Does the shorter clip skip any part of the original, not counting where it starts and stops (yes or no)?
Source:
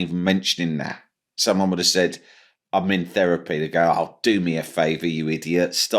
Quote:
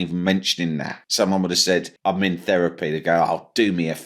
yes